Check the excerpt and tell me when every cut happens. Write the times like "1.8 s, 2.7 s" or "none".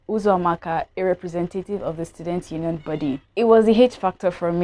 3.3 s